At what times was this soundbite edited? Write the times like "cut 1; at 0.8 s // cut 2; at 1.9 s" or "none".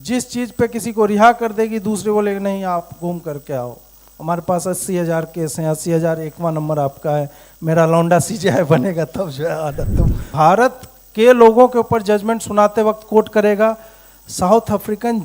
cut 1; at 10.2 s